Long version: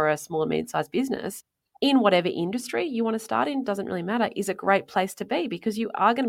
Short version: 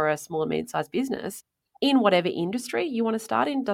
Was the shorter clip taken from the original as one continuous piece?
yes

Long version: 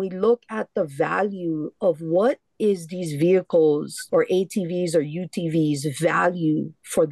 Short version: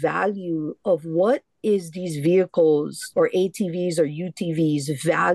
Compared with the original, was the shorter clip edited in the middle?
no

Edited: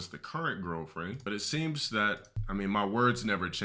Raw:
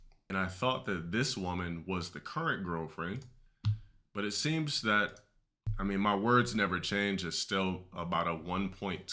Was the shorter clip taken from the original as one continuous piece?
no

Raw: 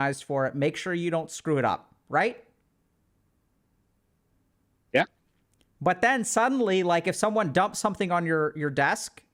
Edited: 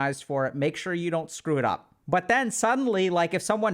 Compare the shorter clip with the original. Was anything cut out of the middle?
yes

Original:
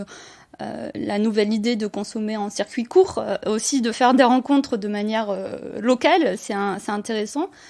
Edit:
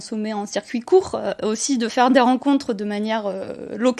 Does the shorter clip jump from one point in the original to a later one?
no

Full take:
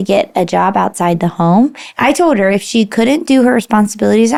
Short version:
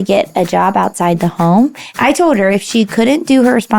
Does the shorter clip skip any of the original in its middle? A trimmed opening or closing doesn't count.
no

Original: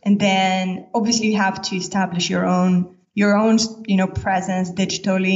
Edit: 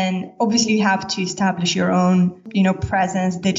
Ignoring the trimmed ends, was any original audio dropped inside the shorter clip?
yes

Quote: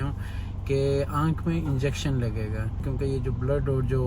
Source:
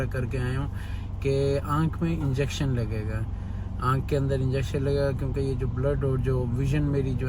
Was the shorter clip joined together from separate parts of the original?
yes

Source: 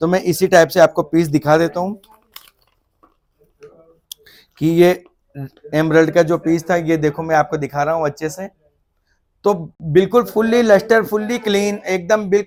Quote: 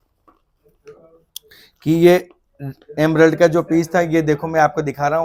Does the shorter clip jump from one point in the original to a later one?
no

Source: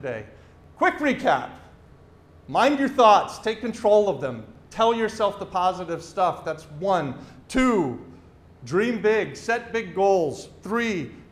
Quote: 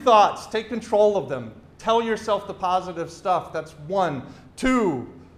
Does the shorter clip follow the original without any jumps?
yes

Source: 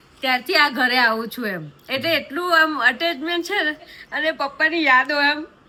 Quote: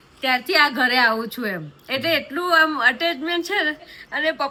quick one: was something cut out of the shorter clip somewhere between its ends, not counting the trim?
no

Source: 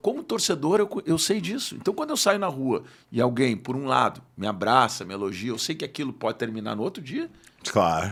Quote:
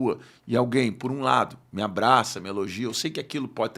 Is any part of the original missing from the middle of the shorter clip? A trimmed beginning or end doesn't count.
no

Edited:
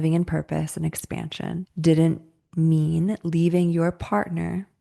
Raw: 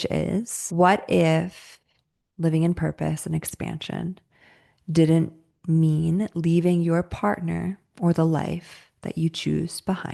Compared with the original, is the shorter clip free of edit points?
no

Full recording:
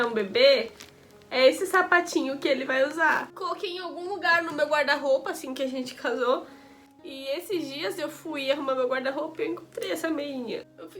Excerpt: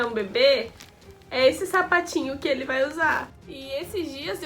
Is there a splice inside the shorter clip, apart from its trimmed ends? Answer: yes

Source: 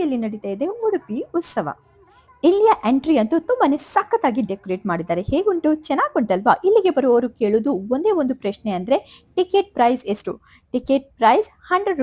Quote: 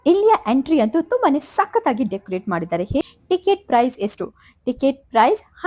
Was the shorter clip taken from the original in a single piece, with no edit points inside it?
no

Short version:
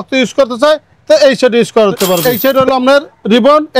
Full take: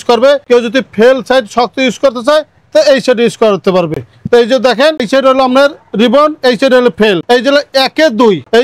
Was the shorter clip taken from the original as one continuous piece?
no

